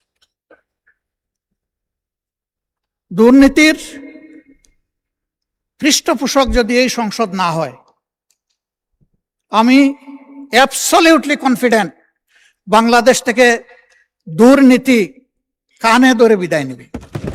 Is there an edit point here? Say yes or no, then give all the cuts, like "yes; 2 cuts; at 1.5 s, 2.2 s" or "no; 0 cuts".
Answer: no; 0 cuts